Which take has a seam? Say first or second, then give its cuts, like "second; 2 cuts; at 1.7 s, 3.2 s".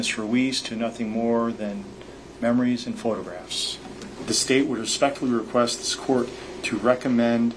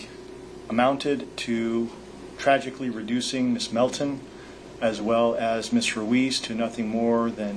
first; 1 cut; at 4.2 s